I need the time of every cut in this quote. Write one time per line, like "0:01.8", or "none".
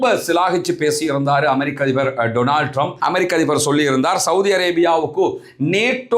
0:02.9